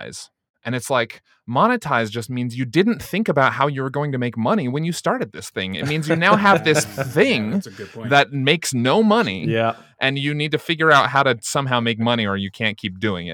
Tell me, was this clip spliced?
no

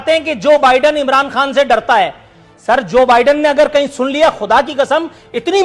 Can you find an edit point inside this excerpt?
no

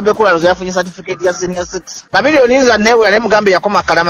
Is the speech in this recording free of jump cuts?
no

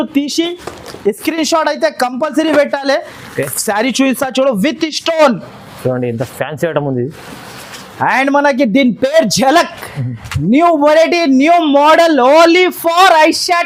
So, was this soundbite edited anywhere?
no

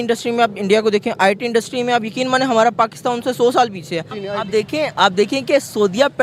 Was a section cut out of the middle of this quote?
yes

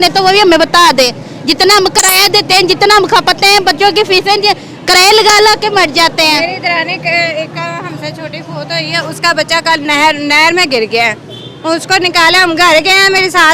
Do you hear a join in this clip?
no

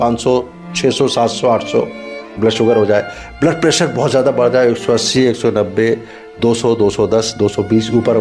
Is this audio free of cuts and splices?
yes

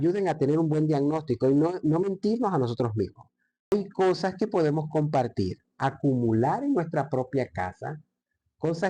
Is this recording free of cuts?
no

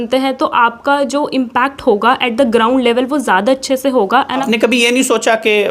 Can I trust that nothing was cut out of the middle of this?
no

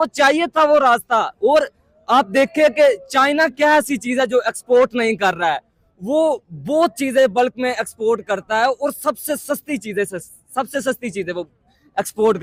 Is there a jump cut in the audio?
no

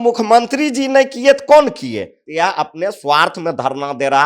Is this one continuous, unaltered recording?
no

